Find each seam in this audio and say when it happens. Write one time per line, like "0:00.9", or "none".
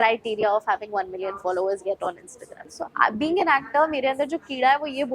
0:02.6